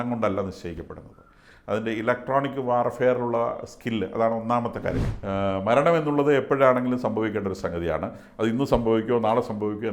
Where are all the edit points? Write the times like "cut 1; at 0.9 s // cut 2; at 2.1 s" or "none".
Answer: cut 1; at 5.0 s